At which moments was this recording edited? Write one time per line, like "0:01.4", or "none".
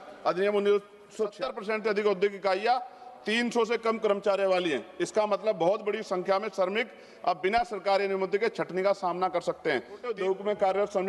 0:01.3
0:10.1